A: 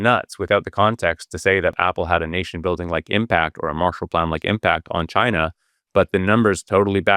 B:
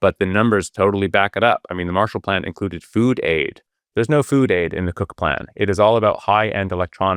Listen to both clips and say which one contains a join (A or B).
A